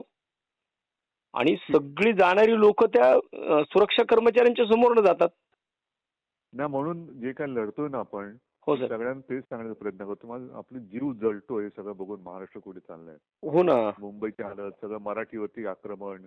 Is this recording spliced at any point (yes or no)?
no